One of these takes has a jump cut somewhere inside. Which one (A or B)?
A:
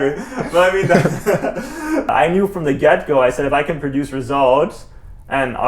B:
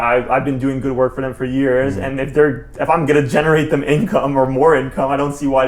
A